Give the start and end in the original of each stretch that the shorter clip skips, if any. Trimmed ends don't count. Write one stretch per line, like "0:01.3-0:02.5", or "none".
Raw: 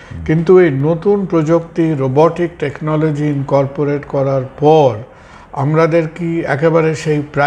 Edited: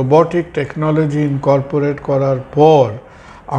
none